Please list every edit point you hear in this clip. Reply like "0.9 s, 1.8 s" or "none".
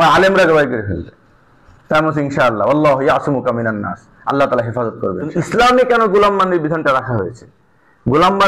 5.3 s